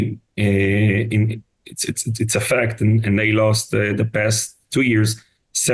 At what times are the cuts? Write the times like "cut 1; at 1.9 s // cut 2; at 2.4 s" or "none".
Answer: none